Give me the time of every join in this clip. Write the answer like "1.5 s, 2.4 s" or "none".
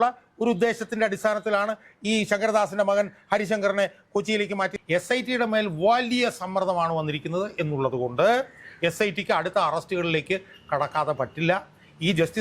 4.8 s